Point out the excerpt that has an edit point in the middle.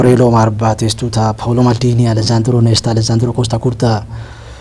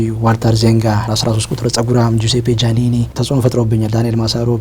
second; 2 cuts; at 1.0 s, 3.1 s

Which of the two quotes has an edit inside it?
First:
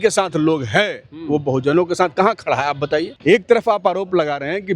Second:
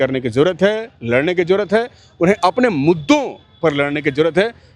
first; 1 cut; at 3.1 s

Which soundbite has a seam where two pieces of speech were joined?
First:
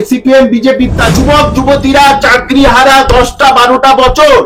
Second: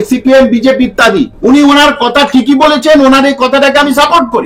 first; 1 cut; at 1.0 s

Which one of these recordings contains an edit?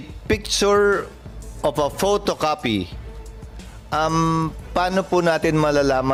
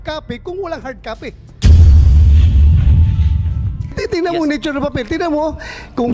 second; 1 cut; at 1.5 s

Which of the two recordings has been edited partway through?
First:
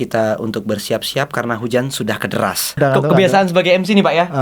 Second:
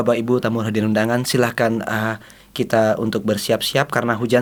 first; 1 cut; at 2.7 s

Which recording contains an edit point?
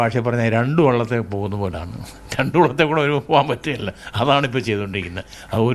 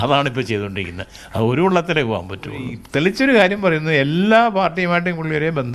second; 1 cut; at 2.8 s

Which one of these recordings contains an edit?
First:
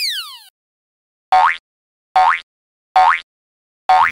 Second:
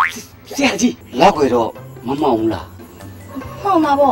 second; 1 cut; at 1.0 s

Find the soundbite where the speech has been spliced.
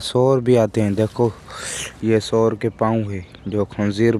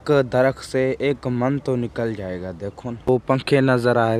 second; 1 cut; at 3.1 s

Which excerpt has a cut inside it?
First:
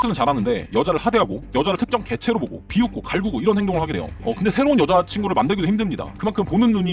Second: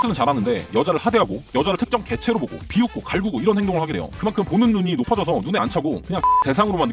second; 2 cuts; at 4.1 s, 6.0 s

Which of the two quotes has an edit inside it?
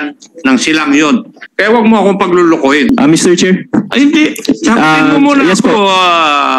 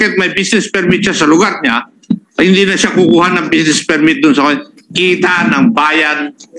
first; 2 cuts; at 1.5 s, 2.9 s

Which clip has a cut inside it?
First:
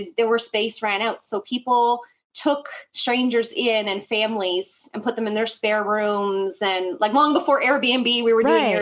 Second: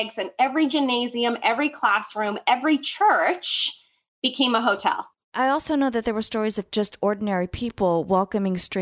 second; 2 cuts; at 5.3 s, 6.7 s

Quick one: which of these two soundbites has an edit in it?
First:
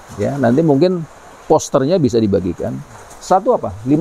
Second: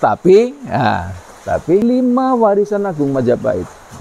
second; 1 cut; at 1.8 s

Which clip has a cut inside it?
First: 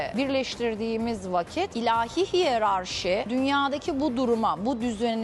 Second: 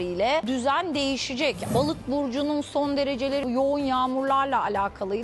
second; 2 cuts; at 1.6 s, 3.4 s

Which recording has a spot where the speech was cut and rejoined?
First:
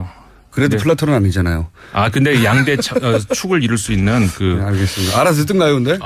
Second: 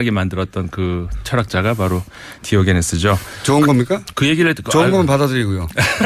second; 1 cut; at 2.9 s

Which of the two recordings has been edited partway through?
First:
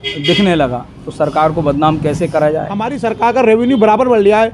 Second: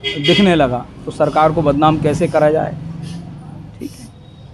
first; 1 cut; at 2.9 s

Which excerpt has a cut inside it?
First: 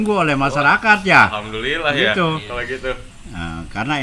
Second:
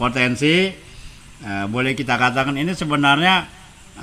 first; 1 cut; at 3.1 s

